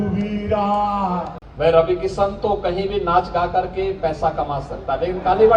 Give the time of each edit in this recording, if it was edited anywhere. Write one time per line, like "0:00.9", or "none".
0:01.4